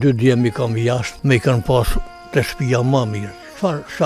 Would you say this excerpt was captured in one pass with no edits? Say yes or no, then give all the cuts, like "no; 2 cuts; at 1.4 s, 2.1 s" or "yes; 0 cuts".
no; 1 cut; at 1.1 s